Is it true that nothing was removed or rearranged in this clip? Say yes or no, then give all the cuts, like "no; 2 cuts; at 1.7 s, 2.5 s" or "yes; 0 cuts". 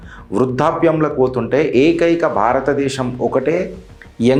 yes; 0 cuts